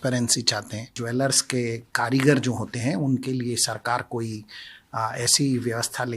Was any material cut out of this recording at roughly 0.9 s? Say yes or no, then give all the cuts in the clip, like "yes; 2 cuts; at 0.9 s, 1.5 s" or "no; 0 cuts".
yes; 1 cut; at 0.9 s